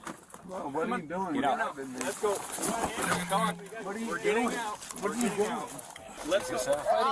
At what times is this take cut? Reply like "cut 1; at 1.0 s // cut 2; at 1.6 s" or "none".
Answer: cut 1; at 6.1 s